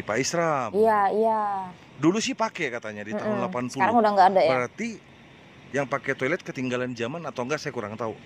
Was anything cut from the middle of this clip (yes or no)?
no